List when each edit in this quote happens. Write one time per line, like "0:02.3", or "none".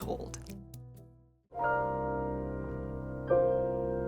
0:01.6